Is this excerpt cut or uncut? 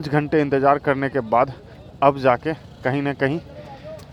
uncut